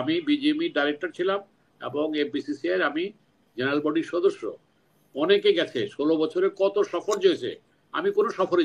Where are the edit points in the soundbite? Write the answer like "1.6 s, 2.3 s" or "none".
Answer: none